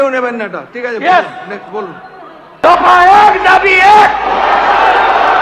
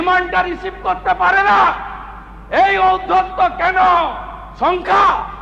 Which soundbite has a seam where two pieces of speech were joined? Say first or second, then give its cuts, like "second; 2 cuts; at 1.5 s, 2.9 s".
first; 1 cut; at 2.6 s